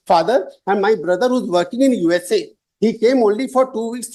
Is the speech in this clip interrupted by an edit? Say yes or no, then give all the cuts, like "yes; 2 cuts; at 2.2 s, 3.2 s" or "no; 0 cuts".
no; 0 cuts